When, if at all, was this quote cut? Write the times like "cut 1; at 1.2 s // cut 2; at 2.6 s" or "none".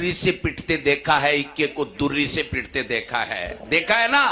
none

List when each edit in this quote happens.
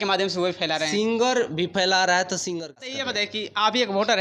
cut 1; at 2.8 s

